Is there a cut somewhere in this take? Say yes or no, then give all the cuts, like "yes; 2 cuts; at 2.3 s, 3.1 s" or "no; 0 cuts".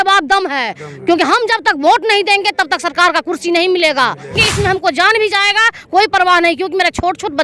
yes; 1 cut; at 4.4 s